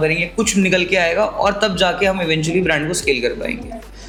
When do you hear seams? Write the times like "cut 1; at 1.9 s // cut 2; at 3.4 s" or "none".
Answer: none